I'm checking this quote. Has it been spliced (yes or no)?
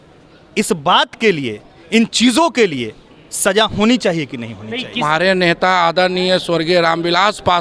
yes